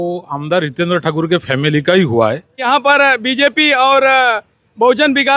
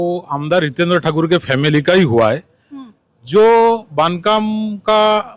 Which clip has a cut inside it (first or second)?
first